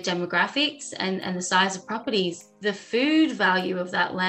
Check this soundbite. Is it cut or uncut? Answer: uncut